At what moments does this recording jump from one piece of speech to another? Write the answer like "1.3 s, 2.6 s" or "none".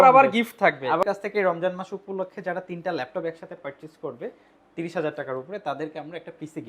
1.0 s

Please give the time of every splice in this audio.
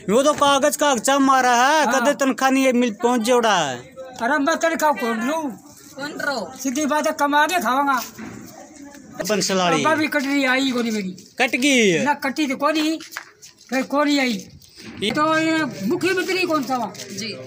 9.2 s, 15.1 s

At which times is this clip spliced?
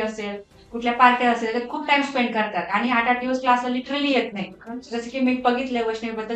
none

